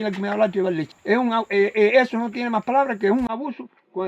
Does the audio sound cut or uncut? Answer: cut